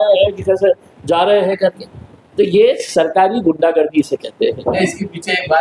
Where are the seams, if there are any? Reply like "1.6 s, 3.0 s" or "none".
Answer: none